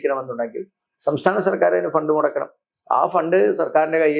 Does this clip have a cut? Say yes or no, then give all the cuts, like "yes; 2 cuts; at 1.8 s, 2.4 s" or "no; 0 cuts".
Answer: no; 0 cuts